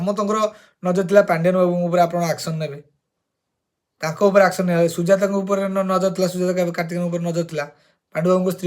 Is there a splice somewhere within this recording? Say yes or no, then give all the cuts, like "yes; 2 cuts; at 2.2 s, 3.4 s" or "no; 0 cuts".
yes; 1 cut; at 0.9 s